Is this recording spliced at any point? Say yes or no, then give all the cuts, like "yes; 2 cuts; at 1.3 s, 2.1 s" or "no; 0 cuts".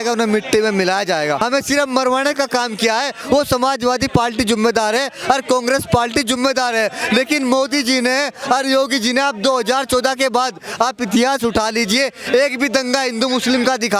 yes; 1 cut; at 1.4 s